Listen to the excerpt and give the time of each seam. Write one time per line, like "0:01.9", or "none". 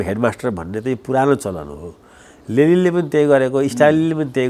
none